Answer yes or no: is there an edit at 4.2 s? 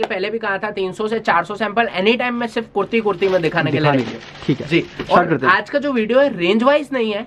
no